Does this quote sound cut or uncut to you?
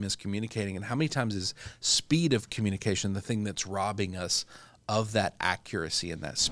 uncut